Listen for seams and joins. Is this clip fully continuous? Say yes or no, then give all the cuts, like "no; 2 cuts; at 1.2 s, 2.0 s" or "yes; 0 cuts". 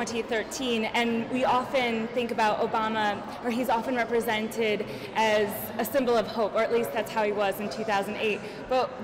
yes; 0 cuts